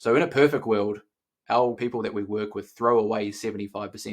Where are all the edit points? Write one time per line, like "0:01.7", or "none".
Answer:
0:01.8